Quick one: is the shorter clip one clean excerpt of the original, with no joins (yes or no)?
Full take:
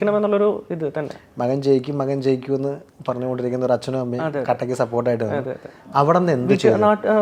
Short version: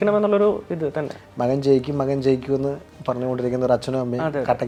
yes